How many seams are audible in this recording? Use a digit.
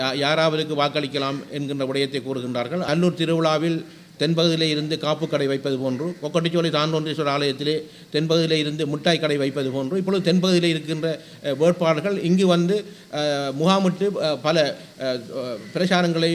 1